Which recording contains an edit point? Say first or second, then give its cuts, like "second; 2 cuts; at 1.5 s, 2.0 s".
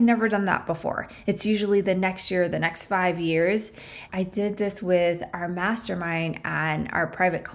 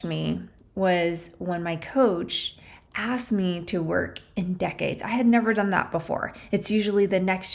first; 1 cut; at 4.0 s